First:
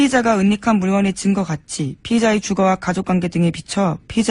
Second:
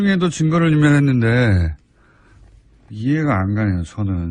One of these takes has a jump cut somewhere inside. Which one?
first; 1 cut; at 1.9 s

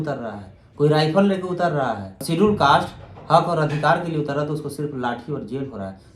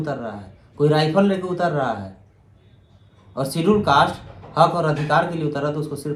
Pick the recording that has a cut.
first; 1 cut; at 2.2 s

